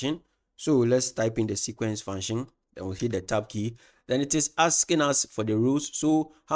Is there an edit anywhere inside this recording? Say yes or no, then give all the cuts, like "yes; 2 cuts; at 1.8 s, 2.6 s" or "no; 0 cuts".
no; 0 cuts